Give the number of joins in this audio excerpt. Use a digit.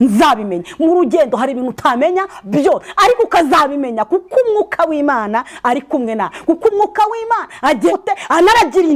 1